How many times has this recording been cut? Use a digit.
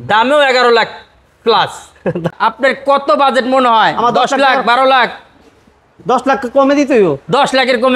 1